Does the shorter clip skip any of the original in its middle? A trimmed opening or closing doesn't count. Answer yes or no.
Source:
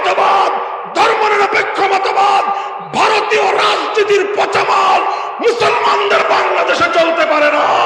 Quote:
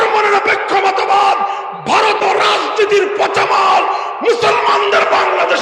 yes